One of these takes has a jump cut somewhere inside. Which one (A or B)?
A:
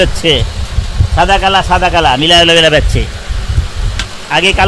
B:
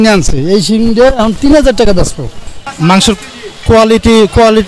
B